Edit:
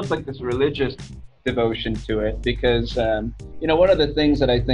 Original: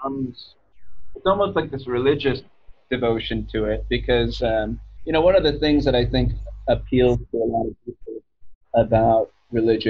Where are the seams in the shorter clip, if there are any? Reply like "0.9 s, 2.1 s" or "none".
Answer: none